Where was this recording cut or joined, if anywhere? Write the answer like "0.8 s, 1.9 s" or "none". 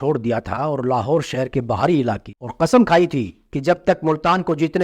2.3 s